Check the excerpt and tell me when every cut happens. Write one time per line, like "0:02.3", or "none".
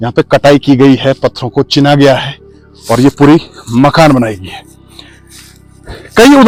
none

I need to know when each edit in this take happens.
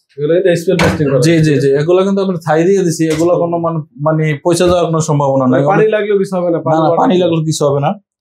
none

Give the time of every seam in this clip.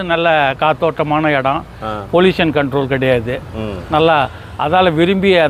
none

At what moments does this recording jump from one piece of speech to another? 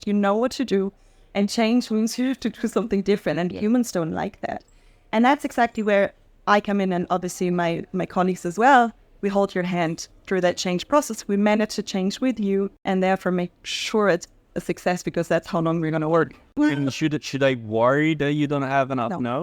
0:12.8
0:16.4

